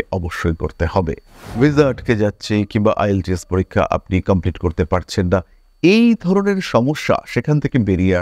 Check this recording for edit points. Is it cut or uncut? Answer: cut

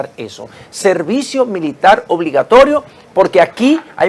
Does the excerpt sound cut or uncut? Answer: uncut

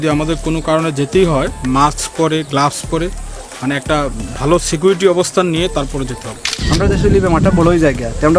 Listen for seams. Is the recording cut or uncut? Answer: cut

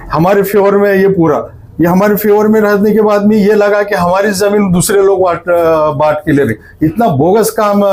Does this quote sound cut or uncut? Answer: uncut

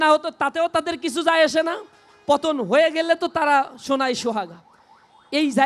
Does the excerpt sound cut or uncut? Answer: uncut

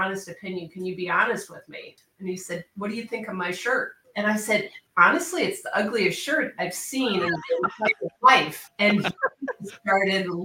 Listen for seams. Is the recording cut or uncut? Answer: cut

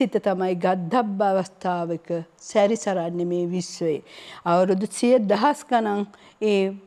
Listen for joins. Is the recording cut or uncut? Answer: uncut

